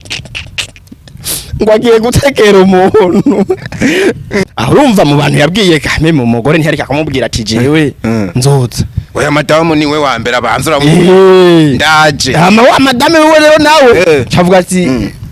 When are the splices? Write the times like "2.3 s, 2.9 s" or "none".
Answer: 4.4 s